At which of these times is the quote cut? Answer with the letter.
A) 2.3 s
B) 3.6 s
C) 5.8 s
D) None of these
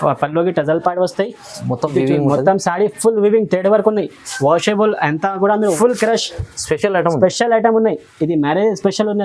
C